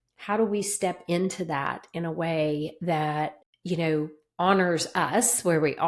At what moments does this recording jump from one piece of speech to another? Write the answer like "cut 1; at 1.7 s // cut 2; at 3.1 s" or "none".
cut 1; at 3.5 s

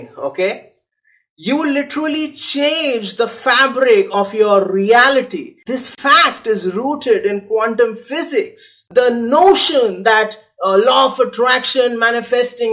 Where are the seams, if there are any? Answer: cut 1; at 5.6 s // cut 2; at 8.8 s

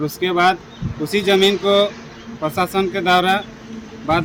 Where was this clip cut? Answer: none

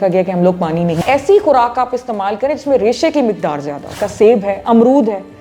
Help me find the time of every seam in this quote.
cut 1; at 1.0 s // cut 2; at 4.0 s

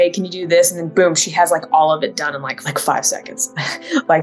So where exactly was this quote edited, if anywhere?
cut 1; at 2.6 s

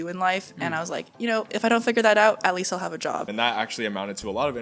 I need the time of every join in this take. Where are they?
cut 1; at 3.3 s

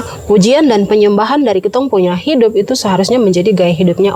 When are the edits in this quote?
none

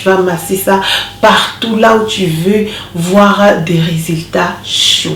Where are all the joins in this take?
none

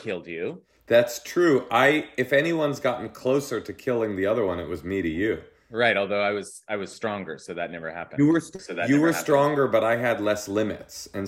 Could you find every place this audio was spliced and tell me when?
none

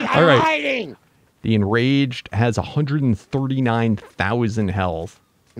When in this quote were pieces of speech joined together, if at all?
cut 1; at 0.9 s

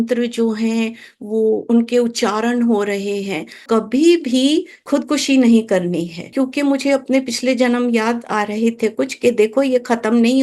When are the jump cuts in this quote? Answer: cut 1; at 3.6 s // cut 2; at 4.8 s // cut 3; at 6.3 s

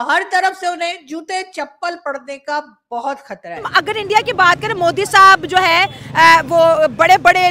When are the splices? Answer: cut 1; at 3.6 s

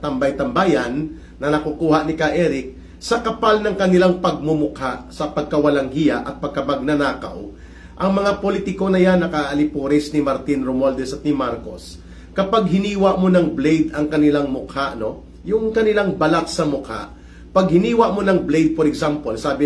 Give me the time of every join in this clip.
none

